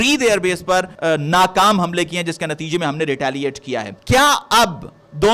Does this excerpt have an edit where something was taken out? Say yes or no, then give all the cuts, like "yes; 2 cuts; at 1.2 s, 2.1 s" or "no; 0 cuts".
yes; 2 cuts; at 0.9 s, 3.9 s